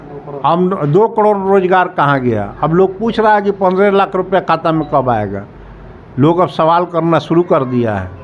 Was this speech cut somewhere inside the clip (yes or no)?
no